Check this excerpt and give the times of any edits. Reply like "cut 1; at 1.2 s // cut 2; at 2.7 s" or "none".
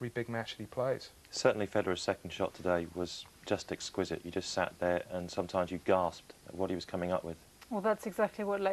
cut 1; at 6.7 s